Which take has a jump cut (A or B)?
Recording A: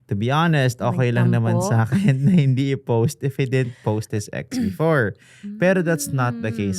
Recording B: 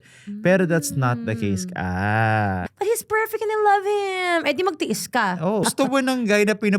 B